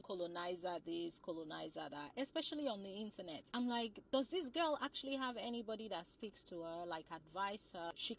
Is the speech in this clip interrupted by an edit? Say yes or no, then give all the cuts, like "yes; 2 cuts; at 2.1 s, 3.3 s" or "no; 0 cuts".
no; 0 cuts